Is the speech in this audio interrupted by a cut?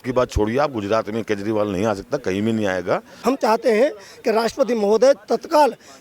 yes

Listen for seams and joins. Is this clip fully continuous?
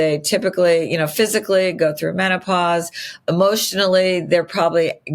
no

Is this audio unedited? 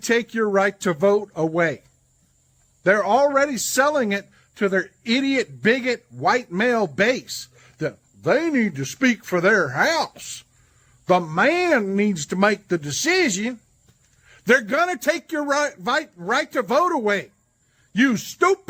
yes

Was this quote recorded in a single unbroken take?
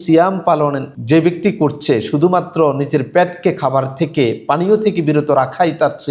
no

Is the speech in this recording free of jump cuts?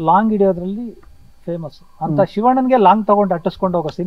yes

